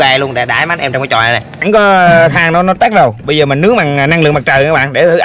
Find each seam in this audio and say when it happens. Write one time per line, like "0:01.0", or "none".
0:01.6